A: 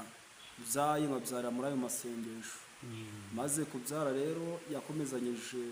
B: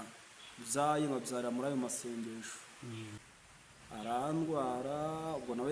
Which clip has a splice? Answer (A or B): B